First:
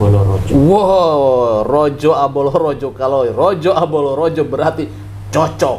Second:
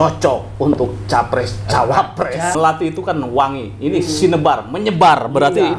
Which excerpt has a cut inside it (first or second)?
second